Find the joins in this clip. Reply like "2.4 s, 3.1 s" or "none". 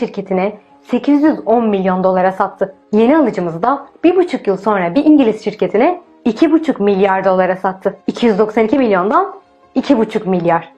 none

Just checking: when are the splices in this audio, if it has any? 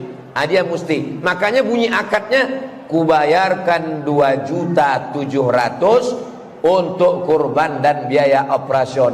none

